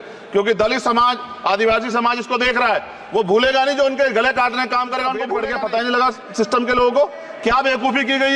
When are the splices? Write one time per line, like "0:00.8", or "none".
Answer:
0:05.3